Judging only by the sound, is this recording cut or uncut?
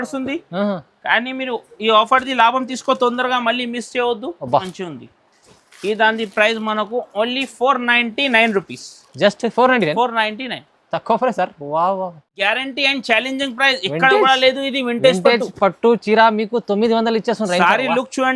cut